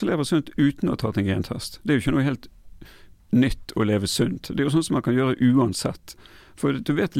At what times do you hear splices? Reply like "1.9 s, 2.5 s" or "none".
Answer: none